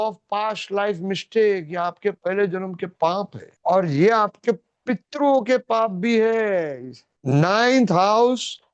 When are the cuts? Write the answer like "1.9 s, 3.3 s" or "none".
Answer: none